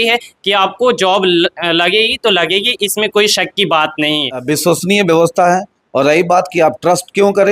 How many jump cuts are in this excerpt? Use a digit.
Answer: 1